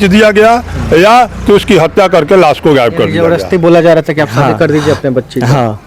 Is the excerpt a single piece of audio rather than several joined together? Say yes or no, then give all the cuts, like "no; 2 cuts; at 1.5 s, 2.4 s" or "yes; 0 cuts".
no; 1 cut; at 3.2 s